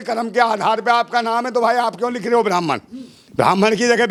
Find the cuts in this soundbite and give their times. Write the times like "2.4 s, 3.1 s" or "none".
none